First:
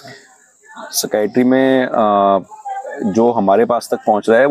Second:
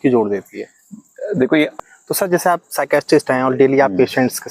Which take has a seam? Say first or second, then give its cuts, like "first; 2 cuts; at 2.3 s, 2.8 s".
second; 1 cut; at 1.7 s